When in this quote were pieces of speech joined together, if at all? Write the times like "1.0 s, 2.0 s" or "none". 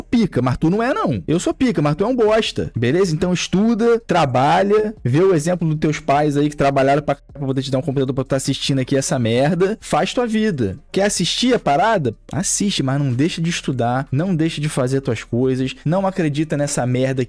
9.8 s, 12.2 s

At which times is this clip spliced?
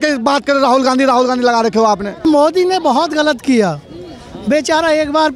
2.2 s

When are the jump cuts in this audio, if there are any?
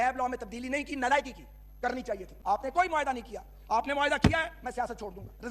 2.3 s

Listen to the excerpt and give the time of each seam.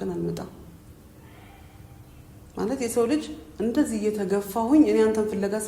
none

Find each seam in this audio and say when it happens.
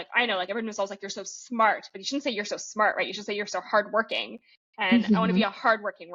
none

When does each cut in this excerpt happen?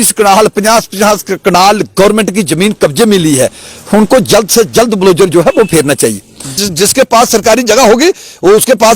6.6 s

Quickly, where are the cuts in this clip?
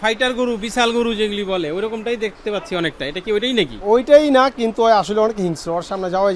none

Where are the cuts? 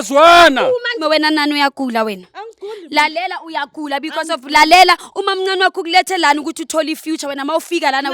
0.9 s

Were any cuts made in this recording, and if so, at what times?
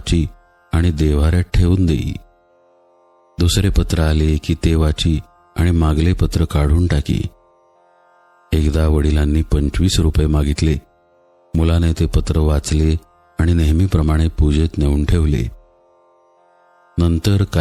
none

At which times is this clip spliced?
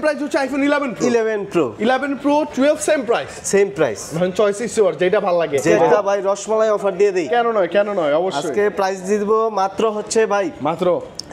6.0 s

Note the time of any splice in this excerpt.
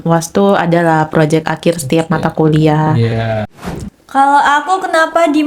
3.6 s

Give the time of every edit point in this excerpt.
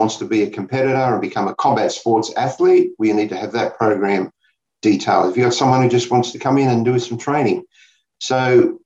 1.6 s

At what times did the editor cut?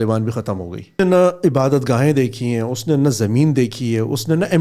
1.0 s

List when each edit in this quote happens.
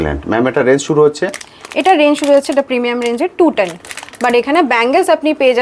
none

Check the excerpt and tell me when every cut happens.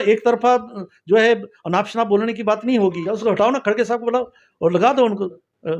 3.2 s

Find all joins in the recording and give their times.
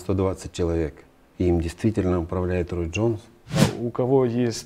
3.6 s

